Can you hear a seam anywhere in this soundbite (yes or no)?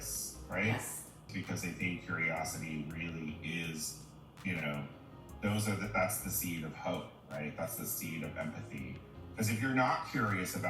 yes